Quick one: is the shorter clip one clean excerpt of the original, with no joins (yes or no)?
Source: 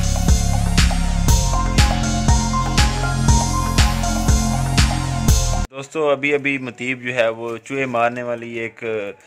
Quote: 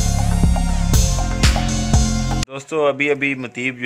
no